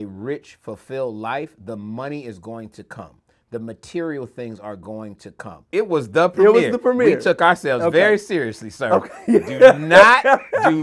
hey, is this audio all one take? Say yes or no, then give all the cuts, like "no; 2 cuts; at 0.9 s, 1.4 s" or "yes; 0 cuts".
no; 1 cut; at 5.7 s